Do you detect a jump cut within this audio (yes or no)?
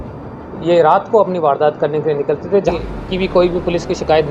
yes